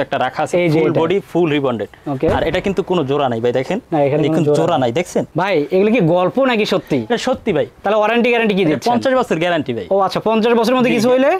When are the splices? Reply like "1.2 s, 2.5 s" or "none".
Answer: 5.3 s